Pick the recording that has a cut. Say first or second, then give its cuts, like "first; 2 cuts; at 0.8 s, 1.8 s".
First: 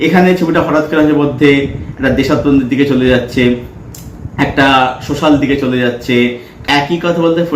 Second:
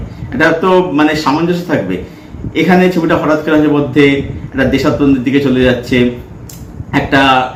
first; 1 cut; at 6.5 s